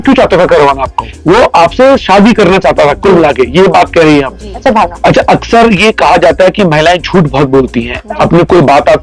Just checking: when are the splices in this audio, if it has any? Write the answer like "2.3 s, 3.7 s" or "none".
1.1 s, 4.5 s